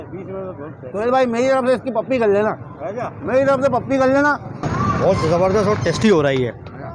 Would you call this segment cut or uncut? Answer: cut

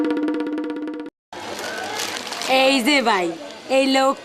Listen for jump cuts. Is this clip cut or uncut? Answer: cut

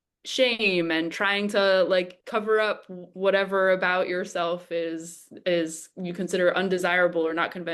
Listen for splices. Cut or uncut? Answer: uncut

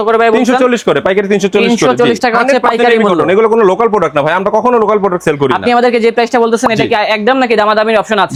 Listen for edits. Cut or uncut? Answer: uncut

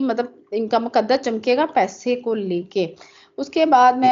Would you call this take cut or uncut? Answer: uncut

